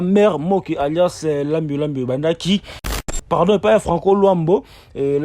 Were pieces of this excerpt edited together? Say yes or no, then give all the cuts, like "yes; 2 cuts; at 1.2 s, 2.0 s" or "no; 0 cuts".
yes; 1 cut; at 3.0 s